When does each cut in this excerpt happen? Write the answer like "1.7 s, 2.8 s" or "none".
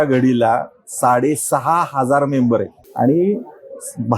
2.8 s